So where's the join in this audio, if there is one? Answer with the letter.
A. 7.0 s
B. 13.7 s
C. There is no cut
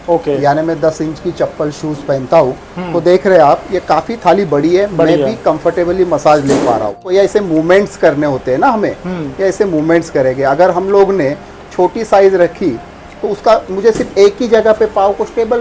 A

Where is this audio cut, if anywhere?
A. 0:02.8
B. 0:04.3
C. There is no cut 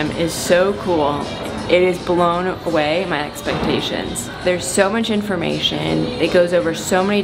C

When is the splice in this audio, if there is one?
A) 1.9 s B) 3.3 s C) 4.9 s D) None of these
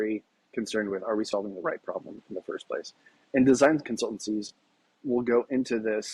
C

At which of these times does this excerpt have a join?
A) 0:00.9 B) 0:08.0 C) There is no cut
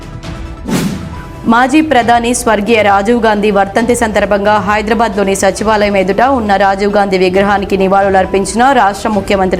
A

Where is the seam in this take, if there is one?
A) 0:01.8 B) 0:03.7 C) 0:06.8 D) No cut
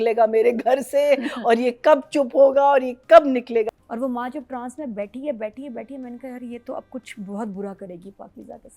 B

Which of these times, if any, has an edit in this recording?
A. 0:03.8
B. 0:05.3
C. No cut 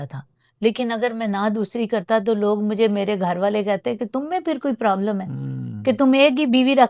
C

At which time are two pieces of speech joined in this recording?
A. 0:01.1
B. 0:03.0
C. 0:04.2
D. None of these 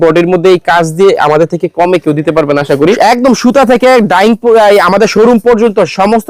B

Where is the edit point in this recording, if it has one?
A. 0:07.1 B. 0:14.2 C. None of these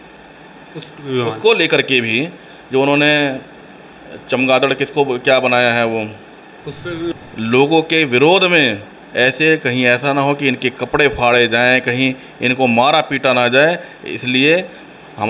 A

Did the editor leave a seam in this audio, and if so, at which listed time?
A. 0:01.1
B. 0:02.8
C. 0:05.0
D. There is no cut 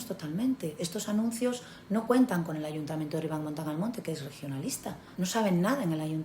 C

